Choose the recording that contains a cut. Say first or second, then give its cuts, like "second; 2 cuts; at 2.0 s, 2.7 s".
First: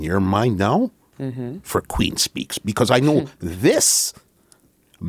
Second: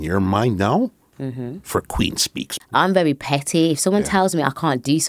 second; 1 cut; at 2.6 s